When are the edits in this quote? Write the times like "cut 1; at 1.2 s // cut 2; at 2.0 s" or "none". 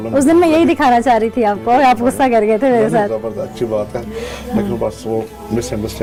none

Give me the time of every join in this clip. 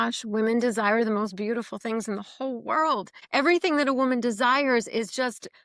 cut 1; at 3.2 s

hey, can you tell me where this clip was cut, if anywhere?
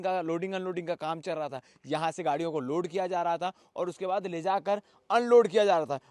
none

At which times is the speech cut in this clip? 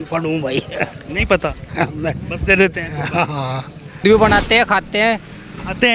cut 1; at 4.0 s

